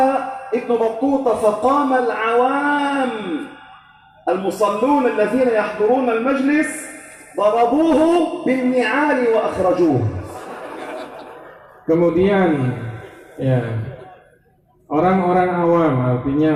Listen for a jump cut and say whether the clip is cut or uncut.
uncut